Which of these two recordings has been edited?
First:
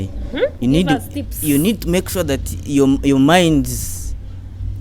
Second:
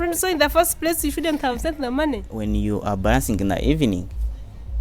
second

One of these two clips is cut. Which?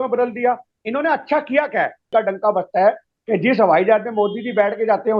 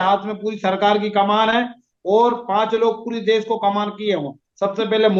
first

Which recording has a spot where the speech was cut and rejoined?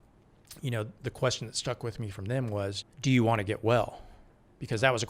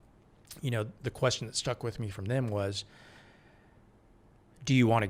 first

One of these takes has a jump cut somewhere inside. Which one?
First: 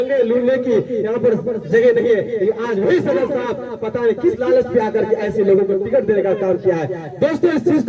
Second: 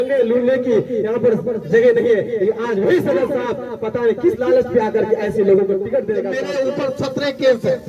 second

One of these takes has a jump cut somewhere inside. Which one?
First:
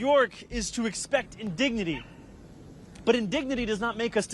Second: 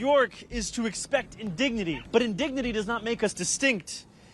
second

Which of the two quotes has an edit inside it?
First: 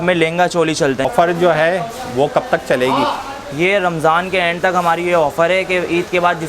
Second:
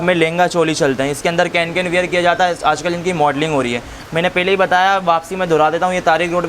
first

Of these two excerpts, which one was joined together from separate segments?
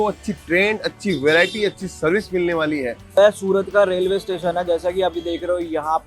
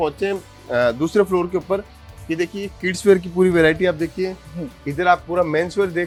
first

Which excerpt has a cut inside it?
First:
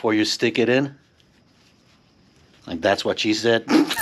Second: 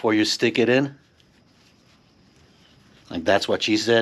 first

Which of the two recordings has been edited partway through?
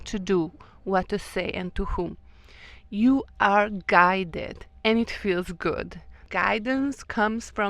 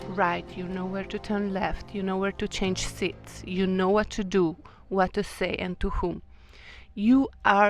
first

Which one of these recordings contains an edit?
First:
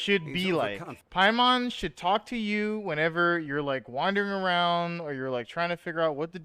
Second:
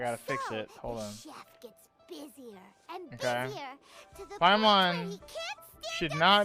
first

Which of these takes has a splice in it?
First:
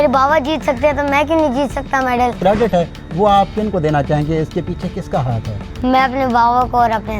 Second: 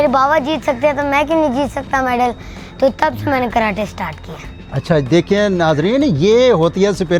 first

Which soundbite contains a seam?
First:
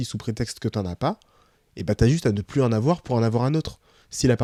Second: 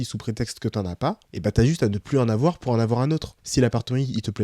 second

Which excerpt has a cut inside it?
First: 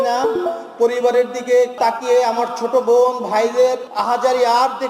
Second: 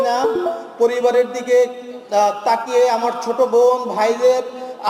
first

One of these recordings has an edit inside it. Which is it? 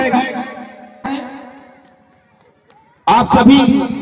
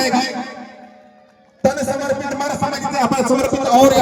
first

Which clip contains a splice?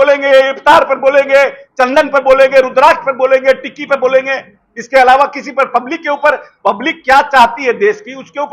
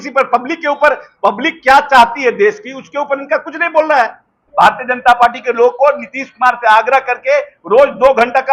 second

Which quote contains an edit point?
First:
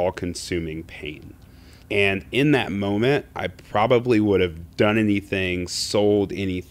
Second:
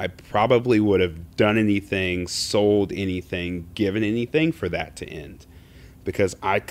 first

